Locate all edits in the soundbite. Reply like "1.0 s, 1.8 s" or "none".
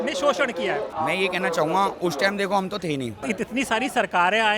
0.9 s, 3.2 s